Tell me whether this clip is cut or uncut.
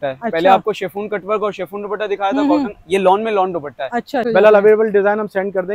cut